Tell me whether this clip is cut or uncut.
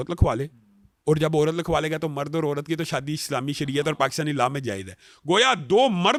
uncut